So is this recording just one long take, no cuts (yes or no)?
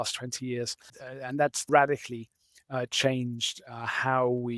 no